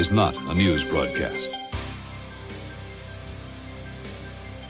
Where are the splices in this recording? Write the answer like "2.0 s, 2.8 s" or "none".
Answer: none